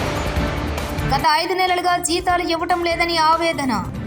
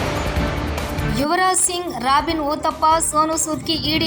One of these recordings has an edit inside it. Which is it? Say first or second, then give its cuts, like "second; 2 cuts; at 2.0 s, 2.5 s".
second; 1 cut; at 0.9 s